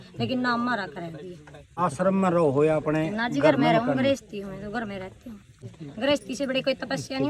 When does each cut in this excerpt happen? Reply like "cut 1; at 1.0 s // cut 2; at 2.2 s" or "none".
cut 1; at 1.7 s // cut 2; at 5.6 s